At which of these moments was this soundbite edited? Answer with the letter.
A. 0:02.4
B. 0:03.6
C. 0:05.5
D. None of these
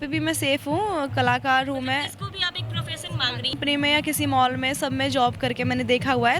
B